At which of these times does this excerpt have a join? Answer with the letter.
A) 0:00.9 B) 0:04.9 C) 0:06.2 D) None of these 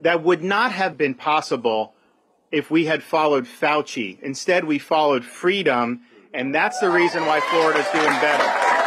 A